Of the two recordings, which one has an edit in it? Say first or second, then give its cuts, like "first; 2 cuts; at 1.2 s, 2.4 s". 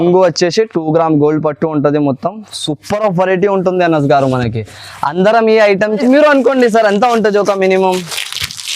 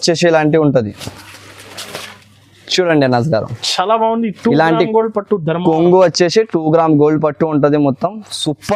first; 1 cut; at 6.0 s